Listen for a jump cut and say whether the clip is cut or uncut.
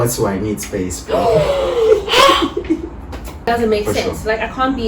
cut